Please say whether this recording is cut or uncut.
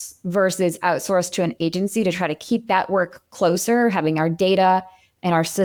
uncut